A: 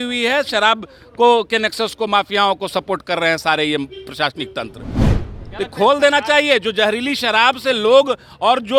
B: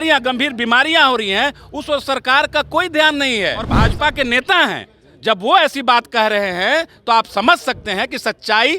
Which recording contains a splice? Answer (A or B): B